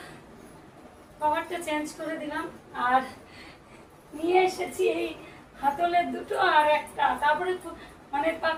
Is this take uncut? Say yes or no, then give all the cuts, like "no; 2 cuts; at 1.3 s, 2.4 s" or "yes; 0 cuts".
yes; 0 cuts